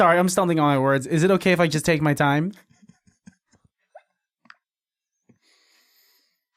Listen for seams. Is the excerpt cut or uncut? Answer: uncut